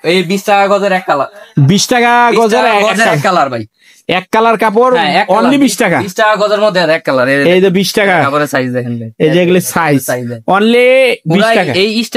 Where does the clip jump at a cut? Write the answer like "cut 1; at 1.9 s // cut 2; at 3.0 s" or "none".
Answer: none